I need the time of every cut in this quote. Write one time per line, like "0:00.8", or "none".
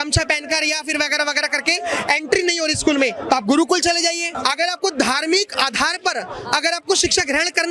0:04.3

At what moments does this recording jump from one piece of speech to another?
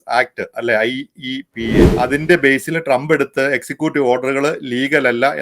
0:01.9

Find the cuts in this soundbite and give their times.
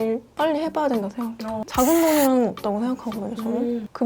0:01.6

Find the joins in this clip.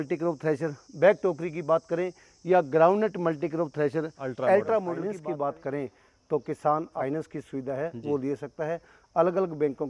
0:05.0
0:06.9

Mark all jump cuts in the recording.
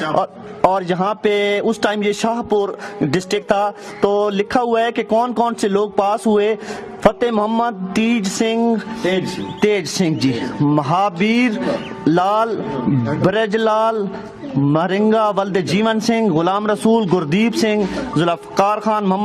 none

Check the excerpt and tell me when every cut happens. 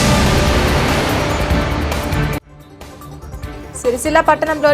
0:03.5

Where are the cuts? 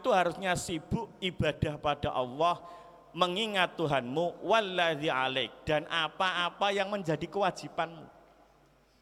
none

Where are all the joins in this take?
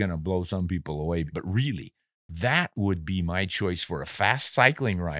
0:01.3

